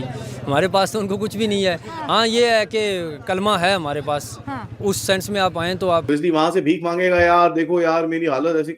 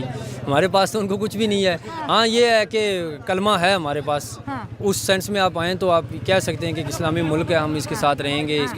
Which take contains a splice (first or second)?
first